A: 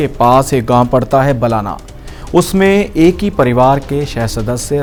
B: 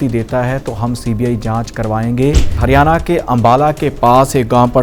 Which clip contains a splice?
B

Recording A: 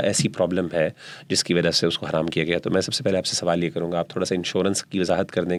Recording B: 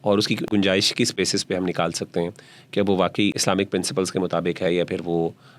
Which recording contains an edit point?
B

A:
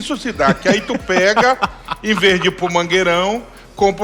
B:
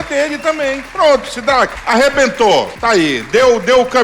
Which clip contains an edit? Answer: B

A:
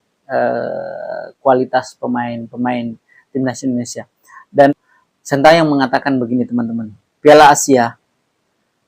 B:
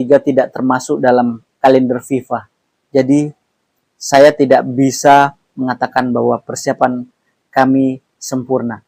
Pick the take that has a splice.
A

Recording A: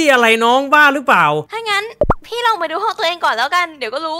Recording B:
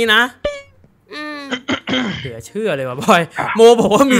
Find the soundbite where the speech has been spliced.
A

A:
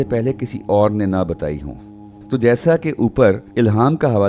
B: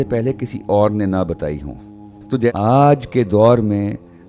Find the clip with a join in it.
B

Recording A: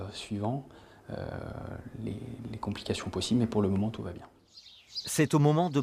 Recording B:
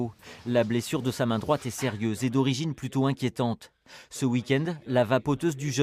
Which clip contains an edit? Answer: A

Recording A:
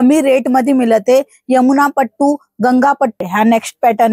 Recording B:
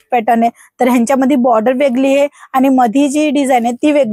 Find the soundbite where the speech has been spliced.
A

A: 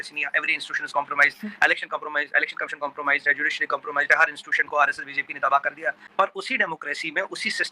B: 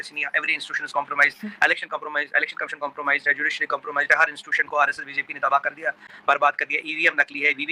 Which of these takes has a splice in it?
A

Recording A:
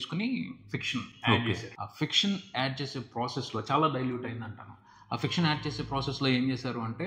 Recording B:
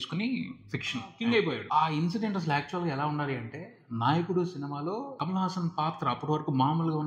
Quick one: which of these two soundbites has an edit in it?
B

